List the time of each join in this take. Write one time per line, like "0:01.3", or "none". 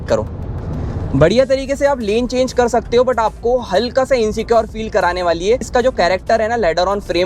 0:05.7